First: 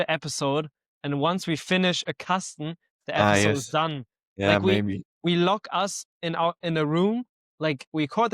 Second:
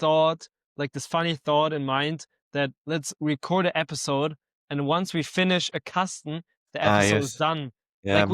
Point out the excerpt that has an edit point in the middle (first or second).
first